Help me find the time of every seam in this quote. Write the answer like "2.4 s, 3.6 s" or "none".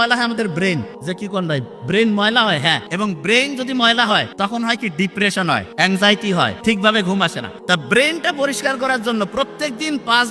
0.9 s, 2.9 s, 4.3 s, 5.7 s, 6.6 s, 7.5 s

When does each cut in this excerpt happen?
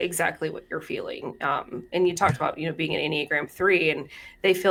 none

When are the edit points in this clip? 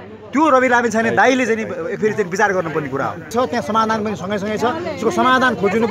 3.3 s

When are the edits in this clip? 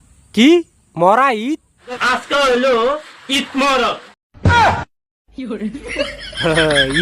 1.8 s

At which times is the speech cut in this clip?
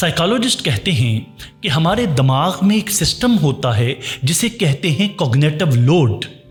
none

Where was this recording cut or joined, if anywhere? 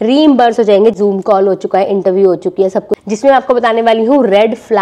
0.9 s, 2.9 s

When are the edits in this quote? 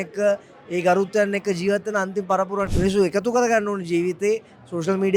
2.7 s

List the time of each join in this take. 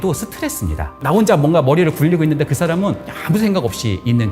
0.9 s

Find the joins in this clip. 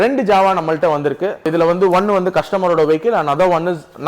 1.5 s

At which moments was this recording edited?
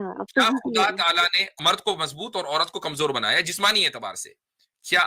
1.6 s

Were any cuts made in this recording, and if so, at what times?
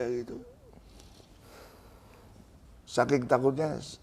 2.7 s

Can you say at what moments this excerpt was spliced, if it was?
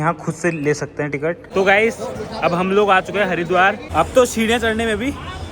1.4 s, 3.8 s

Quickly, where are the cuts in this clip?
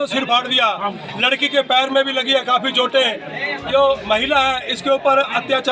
none

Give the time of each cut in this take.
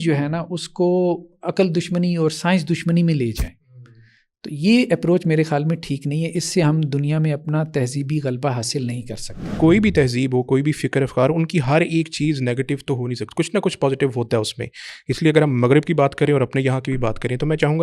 9.5 s

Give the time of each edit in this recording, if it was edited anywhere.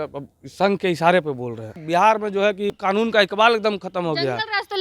1.8 s, 2.8 s

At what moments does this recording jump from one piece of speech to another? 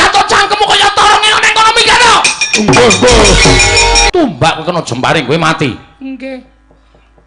4.1 s

